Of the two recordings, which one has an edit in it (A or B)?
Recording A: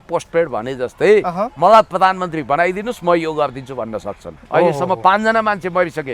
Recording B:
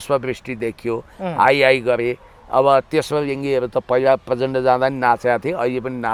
A